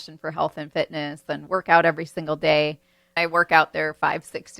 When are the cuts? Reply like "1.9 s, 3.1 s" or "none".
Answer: 3.1 s